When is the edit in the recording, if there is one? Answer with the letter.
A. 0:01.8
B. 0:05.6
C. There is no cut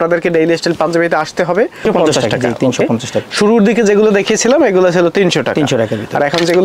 A